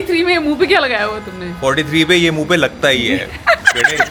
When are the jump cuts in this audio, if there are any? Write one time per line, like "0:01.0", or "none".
none